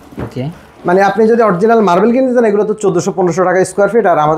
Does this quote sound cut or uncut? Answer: uncut